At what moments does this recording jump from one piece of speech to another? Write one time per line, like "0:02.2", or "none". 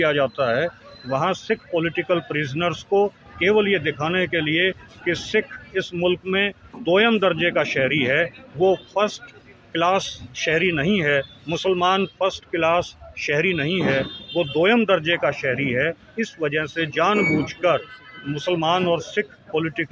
none